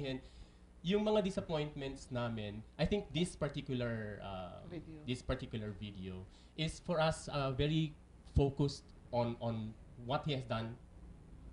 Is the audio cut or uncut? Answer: cut